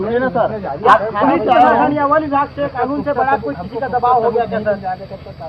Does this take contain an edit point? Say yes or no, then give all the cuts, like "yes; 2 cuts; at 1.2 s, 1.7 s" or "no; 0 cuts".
no; 0 cuts